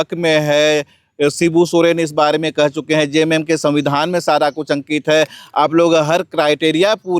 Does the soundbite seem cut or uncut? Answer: uncut